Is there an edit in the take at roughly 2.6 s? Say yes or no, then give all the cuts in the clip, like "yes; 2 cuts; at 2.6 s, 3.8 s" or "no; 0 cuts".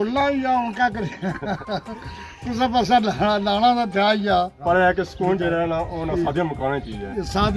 no; 1 cut; at 4.6 s